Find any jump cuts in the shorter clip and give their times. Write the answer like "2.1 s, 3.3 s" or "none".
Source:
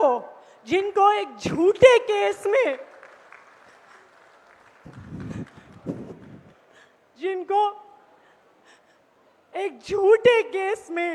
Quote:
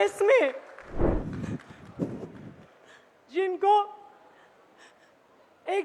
1.0 s